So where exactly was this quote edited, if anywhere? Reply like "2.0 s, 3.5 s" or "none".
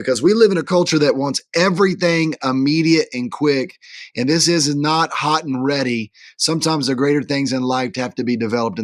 none